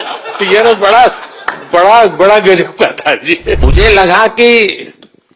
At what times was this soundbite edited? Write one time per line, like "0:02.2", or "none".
0:03.6